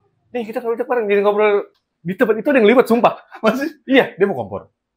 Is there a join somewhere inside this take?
yes; 1 cut; at 1.7 s

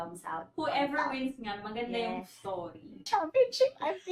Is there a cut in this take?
yes; 1 cut; at 3.0 s

